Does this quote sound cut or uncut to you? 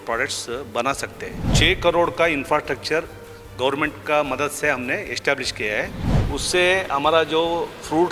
cut